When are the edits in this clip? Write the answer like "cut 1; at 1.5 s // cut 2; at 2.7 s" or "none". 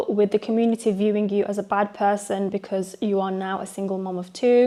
none